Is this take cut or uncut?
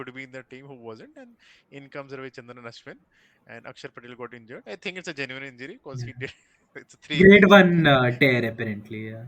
uncut